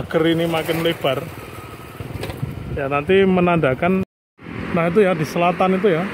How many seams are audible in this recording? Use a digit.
1